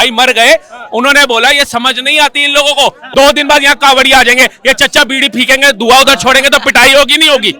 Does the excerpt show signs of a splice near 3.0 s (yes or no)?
yes